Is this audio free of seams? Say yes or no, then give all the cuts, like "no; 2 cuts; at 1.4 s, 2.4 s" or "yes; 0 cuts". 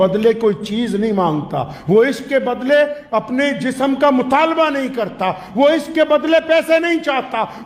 yes; 0 cuts